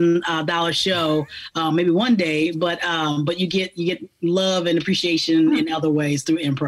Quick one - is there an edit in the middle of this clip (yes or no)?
no